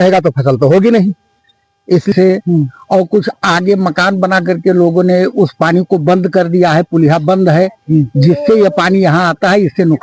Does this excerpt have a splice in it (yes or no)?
yes